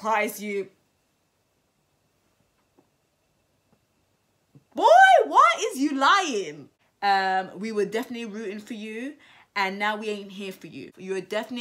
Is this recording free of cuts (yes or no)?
yes